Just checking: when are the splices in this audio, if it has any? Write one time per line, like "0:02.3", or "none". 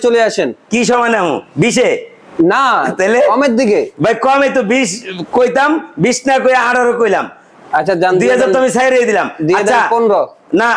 none